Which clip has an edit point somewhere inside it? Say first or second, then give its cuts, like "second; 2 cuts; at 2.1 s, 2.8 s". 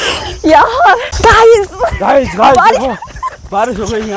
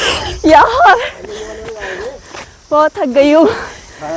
first; 1 cut; at 1.1 s